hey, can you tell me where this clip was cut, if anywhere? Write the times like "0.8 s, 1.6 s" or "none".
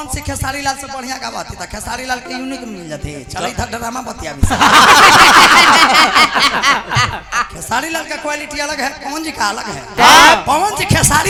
none